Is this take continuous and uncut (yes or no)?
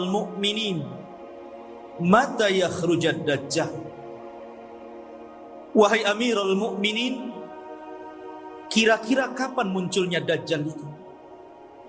no